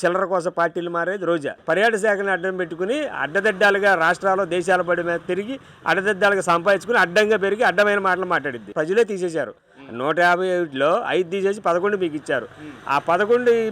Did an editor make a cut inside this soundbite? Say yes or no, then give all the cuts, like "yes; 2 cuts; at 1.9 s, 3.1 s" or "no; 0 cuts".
yes; 2 cuts; at 1.5 s, 8.7 s